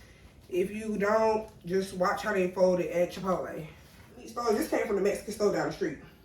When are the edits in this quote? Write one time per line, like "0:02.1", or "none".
0:04.3